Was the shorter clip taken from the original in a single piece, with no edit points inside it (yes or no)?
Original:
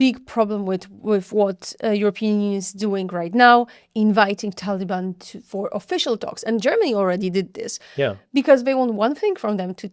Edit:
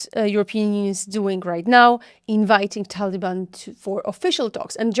yes